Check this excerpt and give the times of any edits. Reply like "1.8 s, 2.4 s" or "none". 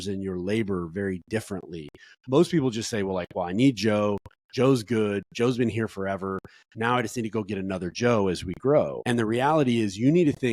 9.0 s